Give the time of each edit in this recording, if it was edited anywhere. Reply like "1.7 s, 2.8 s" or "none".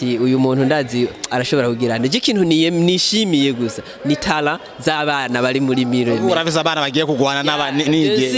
none